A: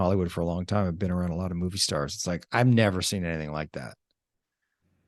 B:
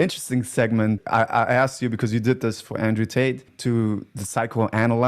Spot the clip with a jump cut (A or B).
B